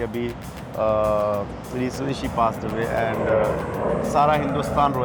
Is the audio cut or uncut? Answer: uncut